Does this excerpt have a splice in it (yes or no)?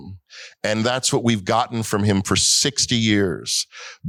no